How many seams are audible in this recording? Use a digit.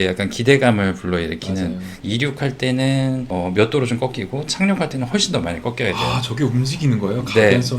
1